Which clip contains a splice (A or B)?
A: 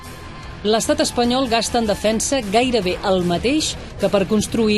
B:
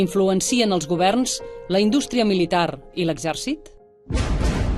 A